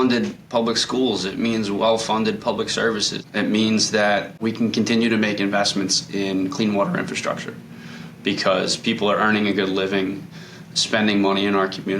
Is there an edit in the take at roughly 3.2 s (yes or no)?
yes